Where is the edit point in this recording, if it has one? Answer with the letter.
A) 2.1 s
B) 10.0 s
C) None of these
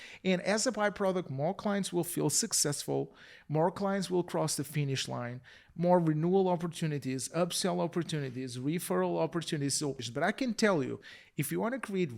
B